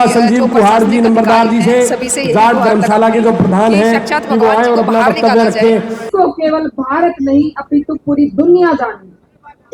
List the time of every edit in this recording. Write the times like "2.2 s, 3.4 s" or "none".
6.1 s